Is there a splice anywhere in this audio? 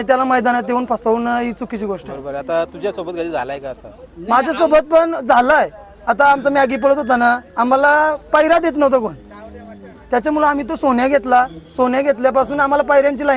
no; 0 cuts

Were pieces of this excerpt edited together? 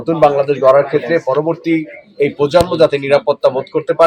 no; 0 cuts

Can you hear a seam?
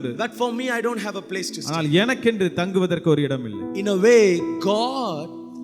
no; 0 cuts

